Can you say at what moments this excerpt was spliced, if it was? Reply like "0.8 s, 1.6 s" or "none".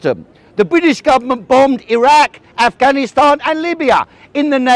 none